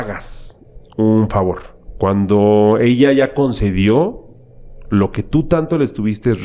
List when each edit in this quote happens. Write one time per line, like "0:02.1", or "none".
none